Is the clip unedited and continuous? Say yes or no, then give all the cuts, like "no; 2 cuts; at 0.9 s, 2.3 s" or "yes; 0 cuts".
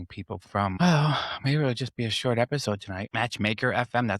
no; 2 cuts; at 0.7 s, 3.0 s